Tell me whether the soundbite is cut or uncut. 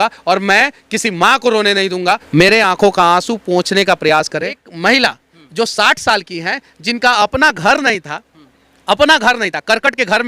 cut